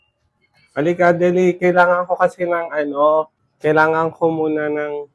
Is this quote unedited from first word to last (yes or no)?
no